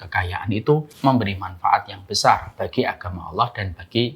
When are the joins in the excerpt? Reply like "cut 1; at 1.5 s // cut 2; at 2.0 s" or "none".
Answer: cut 1; at 0.9 s